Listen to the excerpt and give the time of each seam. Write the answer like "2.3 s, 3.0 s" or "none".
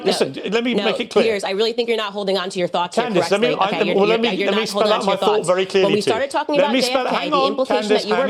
none

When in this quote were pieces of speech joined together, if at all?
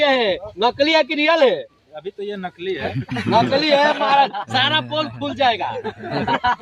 none

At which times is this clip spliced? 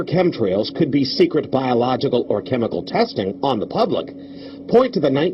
2.8 s

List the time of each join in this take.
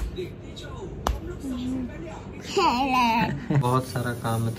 3.6 s

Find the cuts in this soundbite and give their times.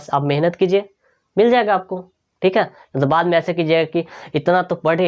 none

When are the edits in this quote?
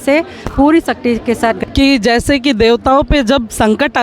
1.6 s

